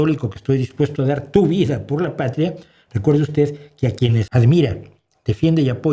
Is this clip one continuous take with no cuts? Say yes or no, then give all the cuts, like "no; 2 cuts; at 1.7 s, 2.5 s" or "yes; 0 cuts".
no; 1 cut; at 4.3 s